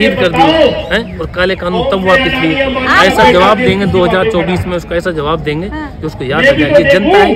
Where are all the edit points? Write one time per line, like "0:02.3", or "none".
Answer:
none